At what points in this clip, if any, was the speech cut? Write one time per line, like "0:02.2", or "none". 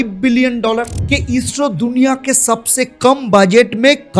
0:01.0